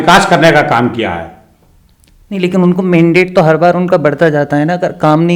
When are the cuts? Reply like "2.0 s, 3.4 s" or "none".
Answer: none

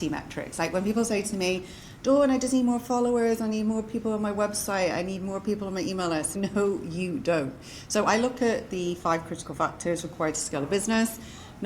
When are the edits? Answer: 6.3 s

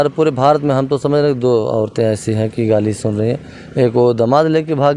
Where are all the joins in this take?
none

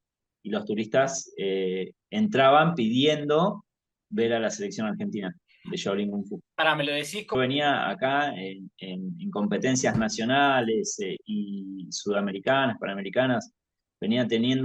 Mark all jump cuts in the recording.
7.3 s

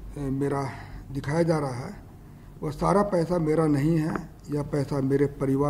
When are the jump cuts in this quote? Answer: none

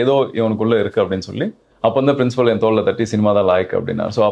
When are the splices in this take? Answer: 1.6 s

